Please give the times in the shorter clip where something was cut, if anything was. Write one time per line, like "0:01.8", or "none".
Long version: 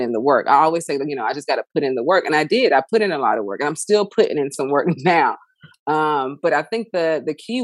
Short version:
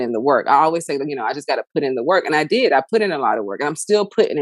none